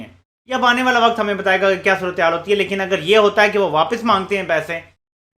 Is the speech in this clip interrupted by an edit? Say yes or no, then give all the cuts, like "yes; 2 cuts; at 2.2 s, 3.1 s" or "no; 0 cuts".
no; 0 cuts